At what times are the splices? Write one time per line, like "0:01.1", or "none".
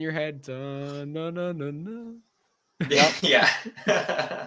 none